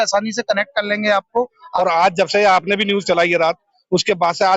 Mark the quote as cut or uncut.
cut